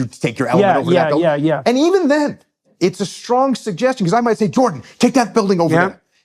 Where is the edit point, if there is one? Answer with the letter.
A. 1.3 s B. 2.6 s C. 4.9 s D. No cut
B